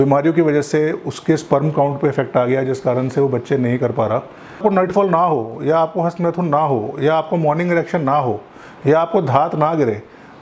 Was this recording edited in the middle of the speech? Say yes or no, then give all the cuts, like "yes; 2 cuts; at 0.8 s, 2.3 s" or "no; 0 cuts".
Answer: yes; 1 cut; at 4.6 s